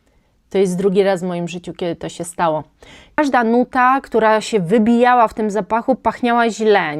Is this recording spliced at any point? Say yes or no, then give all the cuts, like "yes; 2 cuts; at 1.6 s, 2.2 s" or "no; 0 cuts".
yes; 1 cut; at 3.2 s